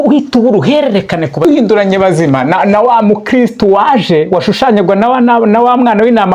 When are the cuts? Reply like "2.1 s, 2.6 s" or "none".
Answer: 1.4 s